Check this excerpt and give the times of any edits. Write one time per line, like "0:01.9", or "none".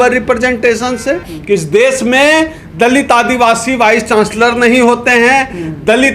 0:01.3